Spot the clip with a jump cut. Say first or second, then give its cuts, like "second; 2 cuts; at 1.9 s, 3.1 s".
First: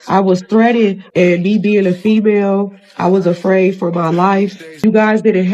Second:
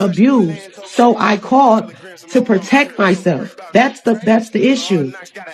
first; 2 cuts; at 1.0 s, 4.7 s